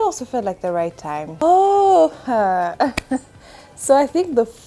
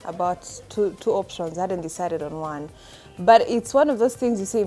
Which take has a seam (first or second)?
first